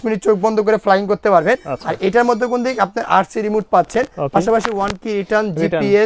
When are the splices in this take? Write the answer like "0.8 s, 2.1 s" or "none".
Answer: none